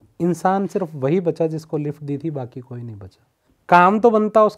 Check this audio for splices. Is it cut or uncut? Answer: cut